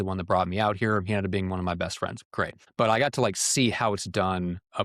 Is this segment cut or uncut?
cut